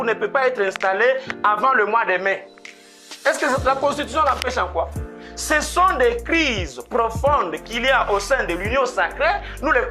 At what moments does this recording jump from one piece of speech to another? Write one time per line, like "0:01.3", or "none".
none